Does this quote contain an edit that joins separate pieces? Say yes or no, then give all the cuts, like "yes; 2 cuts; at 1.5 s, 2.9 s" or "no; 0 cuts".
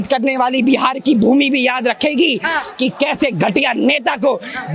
no; 0 cuts